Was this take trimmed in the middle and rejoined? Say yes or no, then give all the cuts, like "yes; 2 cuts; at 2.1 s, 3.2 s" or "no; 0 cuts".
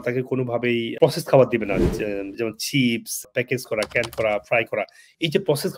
yes; 1 cut; at 0.9 s